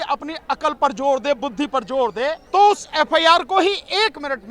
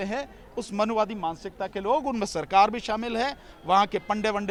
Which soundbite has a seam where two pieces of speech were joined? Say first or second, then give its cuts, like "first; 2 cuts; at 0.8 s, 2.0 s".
first; 1 cut; at 2.4 s